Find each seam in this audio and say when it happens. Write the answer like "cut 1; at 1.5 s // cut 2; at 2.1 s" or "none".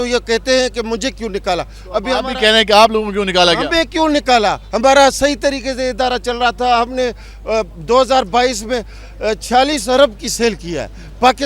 none